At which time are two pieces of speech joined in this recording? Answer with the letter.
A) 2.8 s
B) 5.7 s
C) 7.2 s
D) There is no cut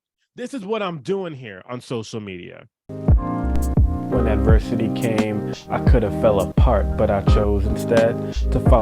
A